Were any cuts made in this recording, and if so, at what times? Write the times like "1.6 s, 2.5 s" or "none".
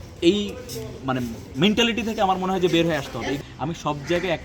3.3 s